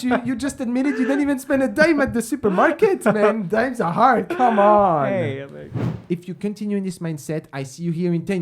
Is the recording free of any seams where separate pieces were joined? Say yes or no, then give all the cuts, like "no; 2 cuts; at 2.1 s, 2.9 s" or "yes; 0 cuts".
no; 1 cut; at 5.9 s